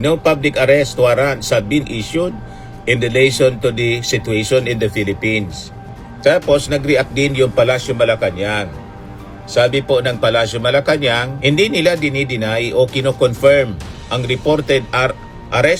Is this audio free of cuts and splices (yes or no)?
yes